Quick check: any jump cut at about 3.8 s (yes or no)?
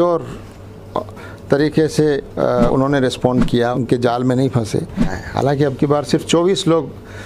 yes